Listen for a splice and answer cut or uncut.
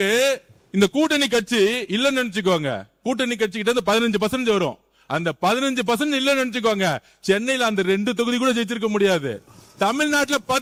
uncut